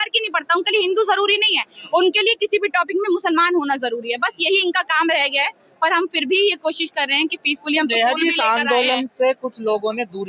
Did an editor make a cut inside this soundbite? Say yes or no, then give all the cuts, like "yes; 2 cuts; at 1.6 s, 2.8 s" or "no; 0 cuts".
no; 0 cuts